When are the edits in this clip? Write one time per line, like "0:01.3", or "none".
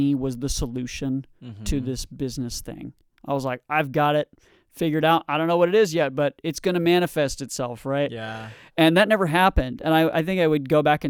none